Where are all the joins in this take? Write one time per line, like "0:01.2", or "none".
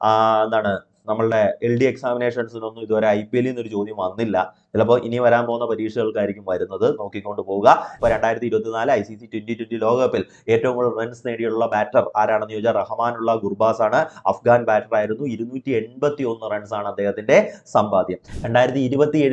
0:07.9
0:18.2